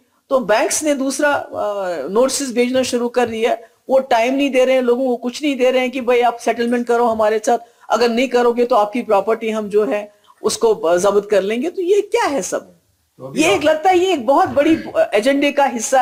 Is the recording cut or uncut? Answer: uncut